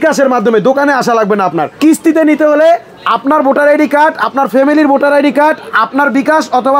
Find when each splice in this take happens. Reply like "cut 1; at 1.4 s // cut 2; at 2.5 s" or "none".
cut 1; at 1.7 s

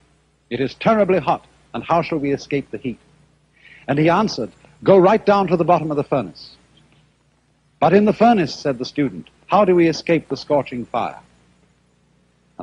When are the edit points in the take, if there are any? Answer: cut 1; at 6.2 s

